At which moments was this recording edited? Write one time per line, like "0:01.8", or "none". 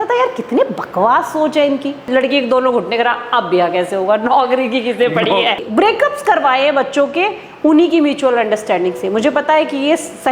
0:02.0
0:05.6